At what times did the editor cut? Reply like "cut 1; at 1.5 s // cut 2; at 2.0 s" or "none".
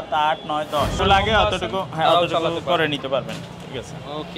cut 1; at 1.0 s